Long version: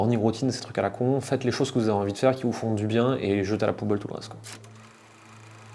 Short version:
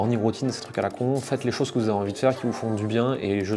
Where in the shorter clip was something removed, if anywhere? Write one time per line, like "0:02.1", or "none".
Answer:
none